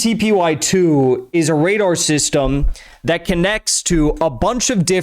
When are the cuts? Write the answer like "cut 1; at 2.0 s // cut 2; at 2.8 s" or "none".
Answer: cut 1; at 1.2 s